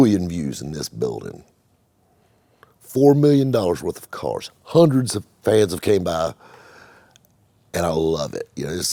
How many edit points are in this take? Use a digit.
0